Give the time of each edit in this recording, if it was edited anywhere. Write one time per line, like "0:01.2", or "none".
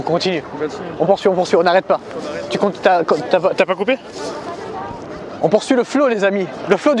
none